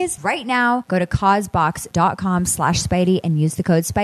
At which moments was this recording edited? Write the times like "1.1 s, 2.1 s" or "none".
0.8 s, 1.8 s